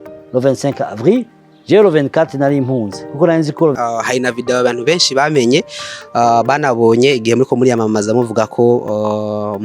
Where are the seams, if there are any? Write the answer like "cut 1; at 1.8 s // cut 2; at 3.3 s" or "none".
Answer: cut 1; at 3.8 s